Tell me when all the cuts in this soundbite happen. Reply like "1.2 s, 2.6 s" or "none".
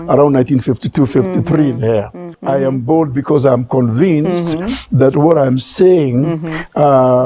2.3 s